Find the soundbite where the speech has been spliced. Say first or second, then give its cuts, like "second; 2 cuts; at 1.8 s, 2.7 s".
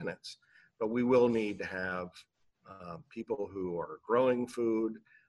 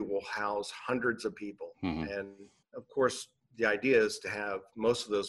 second; 1 cut; at 2.7 s